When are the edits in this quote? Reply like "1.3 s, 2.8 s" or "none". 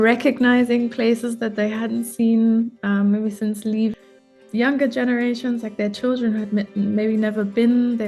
3.9 s